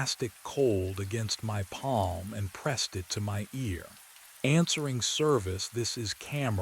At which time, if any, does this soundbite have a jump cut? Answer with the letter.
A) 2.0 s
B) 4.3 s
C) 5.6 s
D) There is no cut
A